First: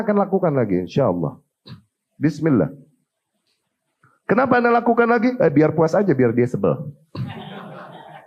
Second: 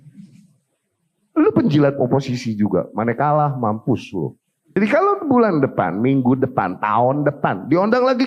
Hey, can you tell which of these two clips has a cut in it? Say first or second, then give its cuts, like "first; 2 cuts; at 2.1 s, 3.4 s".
second; 1 cut; at 4.8 s